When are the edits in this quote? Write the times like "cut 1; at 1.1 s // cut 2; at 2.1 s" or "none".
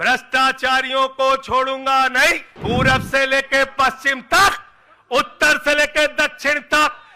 cut 1; at 2.5 s